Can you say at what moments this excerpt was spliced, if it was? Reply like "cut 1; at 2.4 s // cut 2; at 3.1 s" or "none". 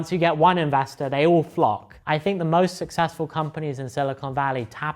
cut 1; at 1.9 s